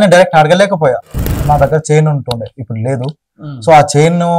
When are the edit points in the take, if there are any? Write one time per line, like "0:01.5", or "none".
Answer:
0:01.3